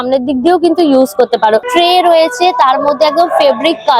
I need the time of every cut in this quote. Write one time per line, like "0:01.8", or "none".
0:01.7